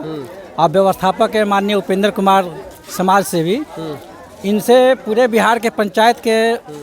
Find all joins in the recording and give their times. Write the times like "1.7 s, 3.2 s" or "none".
none